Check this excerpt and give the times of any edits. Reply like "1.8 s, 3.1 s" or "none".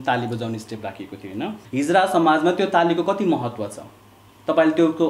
1.6 s